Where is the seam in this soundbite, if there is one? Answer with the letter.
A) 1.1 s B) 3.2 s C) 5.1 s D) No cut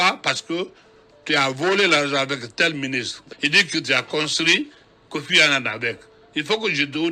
B